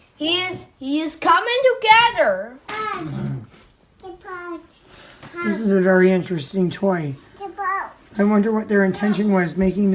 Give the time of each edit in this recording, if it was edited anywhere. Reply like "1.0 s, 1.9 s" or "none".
2.6 s